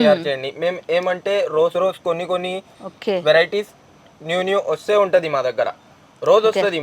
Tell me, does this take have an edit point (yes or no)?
no